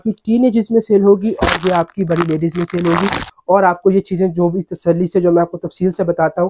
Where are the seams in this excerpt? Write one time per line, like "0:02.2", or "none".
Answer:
0:03.3